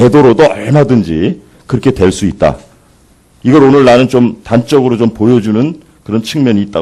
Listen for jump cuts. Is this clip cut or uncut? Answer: cut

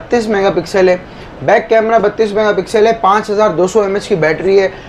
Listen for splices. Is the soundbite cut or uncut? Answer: uncut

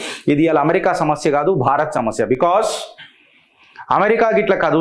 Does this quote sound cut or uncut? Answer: uncut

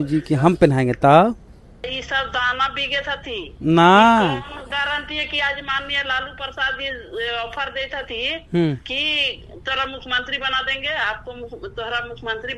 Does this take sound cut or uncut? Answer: cut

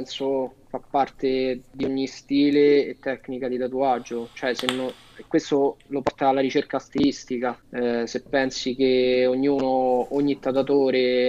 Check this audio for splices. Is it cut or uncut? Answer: uncut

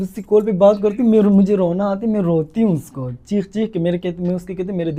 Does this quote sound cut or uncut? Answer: uncut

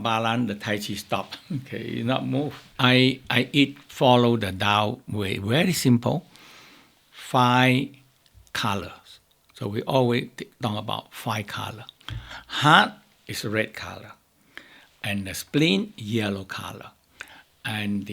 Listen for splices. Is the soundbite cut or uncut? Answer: cut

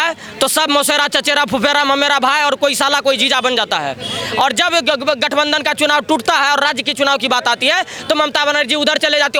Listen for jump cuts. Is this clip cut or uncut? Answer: uncut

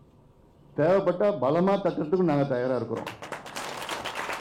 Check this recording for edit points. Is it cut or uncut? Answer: uncut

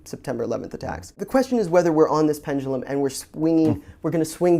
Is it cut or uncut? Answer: cut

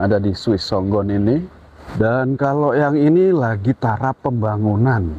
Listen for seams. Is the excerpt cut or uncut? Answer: cut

